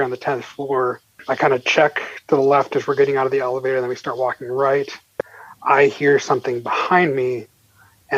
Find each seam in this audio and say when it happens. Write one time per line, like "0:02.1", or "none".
0:01.1

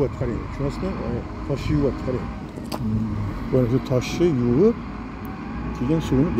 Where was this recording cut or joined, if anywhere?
none

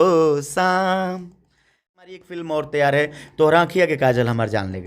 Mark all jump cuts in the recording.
0:02.0

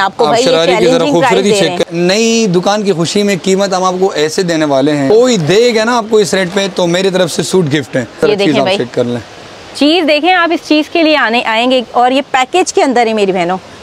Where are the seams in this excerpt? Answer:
0:01.8
0:05.1
0:08.2

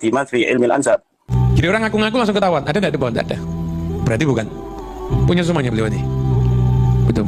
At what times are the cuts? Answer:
0:01.3

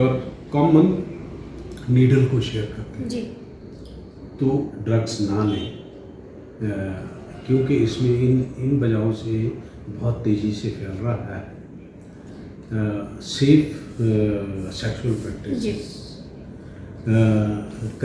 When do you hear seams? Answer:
none

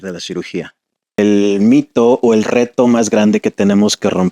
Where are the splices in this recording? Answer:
0:01.2

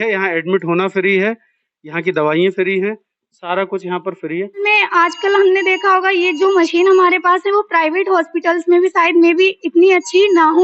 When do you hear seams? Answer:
0:04.6

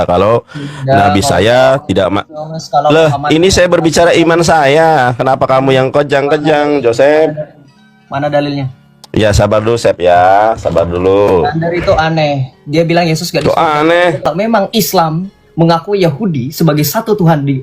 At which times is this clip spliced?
0:14.3

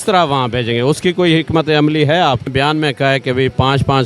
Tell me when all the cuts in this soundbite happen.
0:02.5

